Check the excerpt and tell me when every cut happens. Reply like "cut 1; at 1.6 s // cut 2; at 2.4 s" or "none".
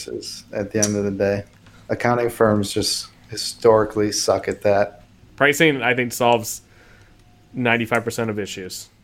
cut 1; at 1.6 s // cut 2; at 5.0 s